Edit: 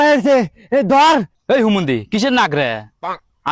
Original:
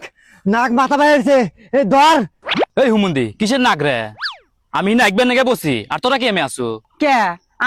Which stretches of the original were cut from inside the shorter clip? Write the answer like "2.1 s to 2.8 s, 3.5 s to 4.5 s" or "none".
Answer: 2.4 s to 2.7 s